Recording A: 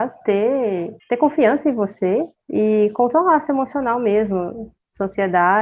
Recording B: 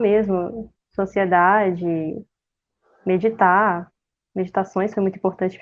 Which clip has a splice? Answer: A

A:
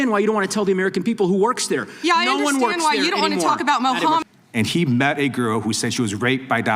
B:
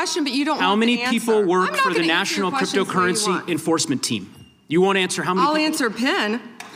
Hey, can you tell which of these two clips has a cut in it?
A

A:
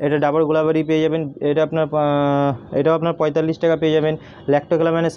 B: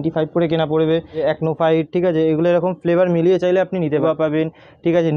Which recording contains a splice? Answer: B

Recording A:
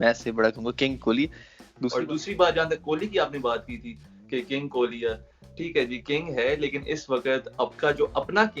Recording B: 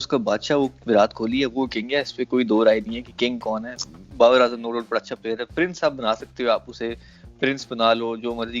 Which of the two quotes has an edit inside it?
A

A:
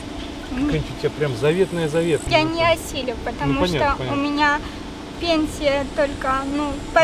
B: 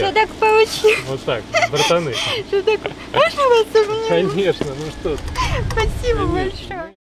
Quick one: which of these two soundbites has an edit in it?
A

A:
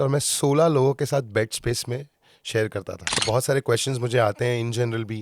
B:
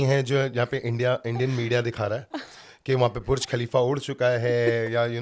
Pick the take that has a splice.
A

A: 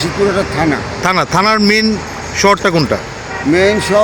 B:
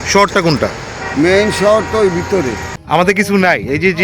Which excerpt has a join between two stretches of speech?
B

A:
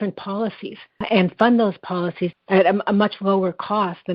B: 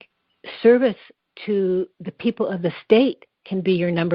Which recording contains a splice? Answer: A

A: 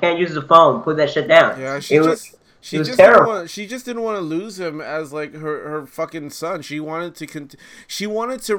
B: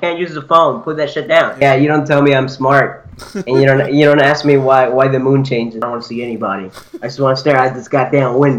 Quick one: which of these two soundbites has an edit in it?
B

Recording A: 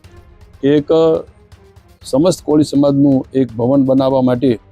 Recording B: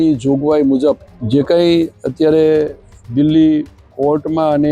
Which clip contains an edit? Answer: B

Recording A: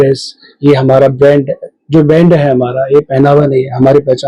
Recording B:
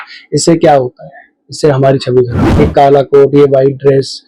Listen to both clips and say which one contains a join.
B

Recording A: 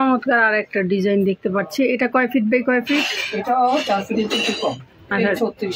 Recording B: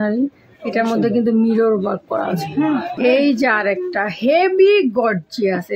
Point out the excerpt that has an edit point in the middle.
B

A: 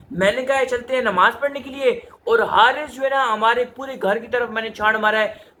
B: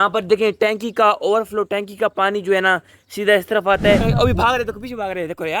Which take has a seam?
B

